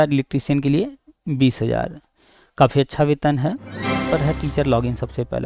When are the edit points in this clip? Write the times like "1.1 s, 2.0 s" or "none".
4.1 s